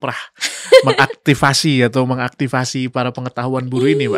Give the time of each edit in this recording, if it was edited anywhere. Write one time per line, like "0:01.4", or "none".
none